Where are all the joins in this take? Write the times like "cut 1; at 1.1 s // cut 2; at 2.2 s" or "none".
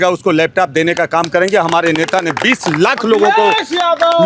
none

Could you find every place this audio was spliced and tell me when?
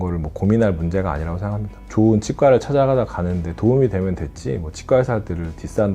cut 1; at 1.8 s

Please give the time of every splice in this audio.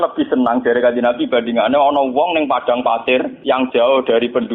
cut 1; at 3.3 s

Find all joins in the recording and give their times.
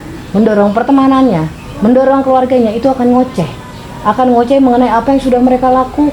none

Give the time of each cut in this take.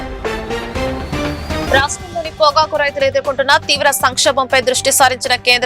cut 1; at 1.6 s

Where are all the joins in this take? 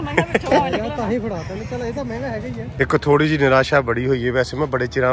cut 1; at 2.7 s

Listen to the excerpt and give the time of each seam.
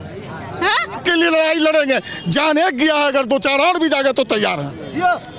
cut 1; at 1.0 s

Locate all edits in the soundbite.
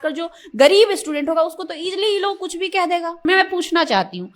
cut 1; at 3.2 s

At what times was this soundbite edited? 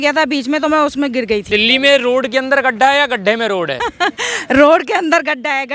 cut 1; at 1.4 s // cut 2; at 3.8 s

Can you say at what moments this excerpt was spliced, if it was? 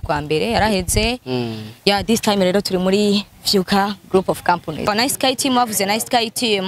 cut 1; at 4.9 s

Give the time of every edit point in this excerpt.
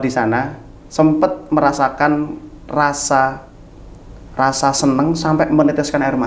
none

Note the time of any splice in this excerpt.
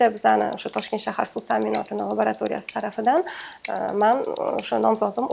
none

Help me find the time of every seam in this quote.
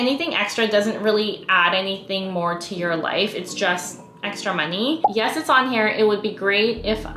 cut 1; at 5.0 s

